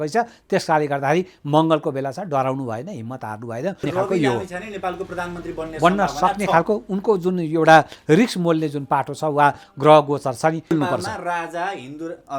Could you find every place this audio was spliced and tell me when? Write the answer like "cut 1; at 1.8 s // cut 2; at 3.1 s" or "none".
cut 1; at 3.8 s // cut 2; at 10.7 s